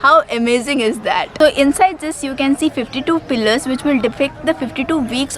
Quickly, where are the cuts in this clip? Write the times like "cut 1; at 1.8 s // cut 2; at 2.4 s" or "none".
none